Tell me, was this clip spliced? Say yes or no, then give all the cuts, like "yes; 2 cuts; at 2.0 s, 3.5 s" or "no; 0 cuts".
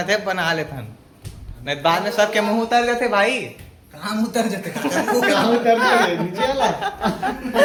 no; 0 cuts